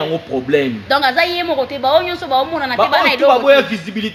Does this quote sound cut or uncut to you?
uncut